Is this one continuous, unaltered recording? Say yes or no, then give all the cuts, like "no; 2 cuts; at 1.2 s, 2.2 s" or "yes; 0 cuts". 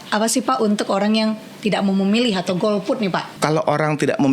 no; 1 cut; at 3.3 s